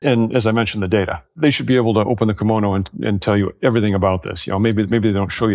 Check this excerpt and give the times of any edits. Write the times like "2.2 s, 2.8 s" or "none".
1.2 s